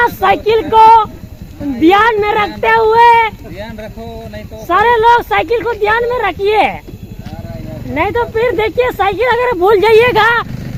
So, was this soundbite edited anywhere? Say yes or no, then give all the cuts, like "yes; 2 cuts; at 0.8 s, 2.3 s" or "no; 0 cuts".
no; 0 cuts